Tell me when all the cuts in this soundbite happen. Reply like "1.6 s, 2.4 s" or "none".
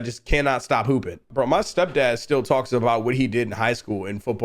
1.3 s

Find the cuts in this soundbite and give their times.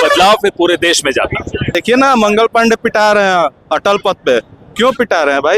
1.7 s

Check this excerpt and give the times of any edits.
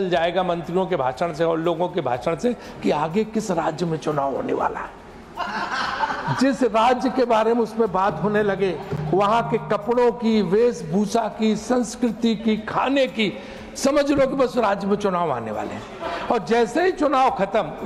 none

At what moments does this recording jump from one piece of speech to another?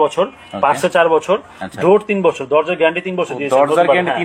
none

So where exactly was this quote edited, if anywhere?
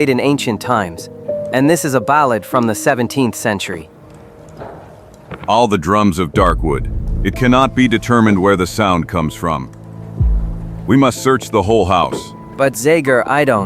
10.8 s

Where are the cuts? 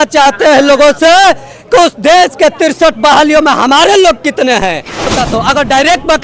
5.1 s

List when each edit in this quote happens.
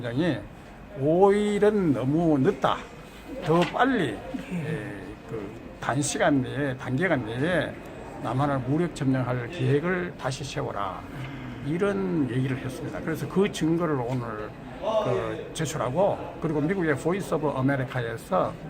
2.0 s

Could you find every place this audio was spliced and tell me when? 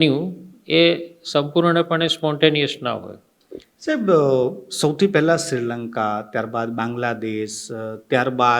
none

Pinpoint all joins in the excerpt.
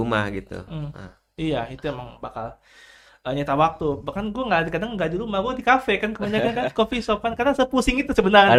none

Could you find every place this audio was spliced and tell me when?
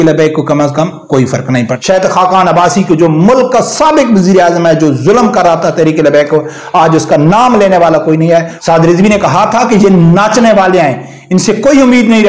1.7 s, 8.5 s

